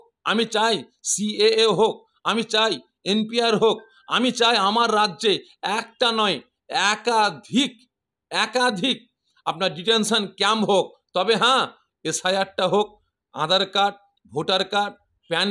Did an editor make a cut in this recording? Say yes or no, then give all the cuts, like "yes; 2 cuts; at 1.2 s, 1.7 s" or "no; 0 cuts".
no; 0 cuts